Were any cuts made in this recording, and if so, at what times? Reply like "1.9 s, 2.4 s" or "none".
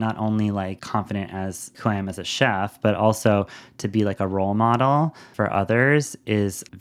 0.8 s, 1.8 s, 5.2 s